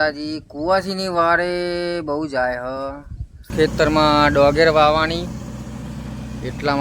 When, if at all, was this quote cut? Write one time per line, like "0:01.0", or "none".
0:03.5